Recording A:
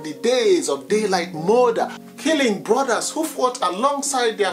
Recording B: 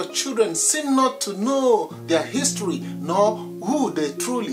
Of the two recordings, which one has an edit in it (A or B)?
A